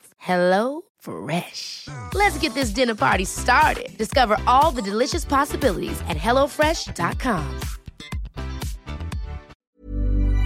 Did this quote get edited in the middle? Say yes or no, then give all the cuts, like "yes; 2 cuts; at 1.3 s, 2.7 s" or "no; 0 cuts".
yes; 1 cut; at 9.5 s